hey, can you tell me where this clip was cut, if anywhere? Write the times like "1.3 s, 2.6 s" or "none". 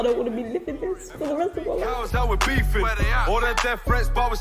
none